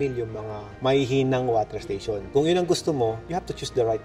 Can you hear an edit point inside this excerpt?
yes; 1 cut; at 2.2 s

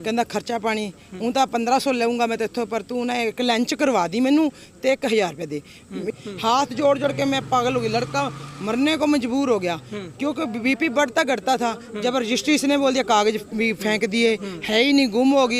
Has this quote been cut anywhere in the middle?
yes; 1 cut; at 6.1 s

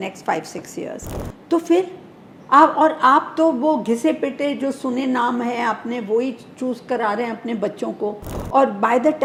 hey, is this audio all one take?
yes; 0 cuts

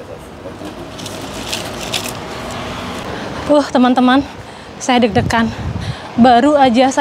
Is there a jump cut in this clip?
yes; 1 cut; at 3.1 s

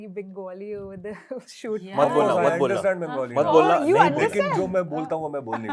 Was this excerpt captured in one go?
yes; 0 cuts

